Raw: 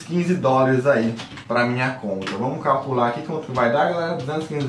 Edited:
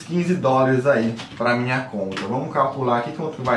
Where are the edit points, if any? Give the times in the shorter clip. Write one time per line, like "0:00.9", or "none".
0:01.3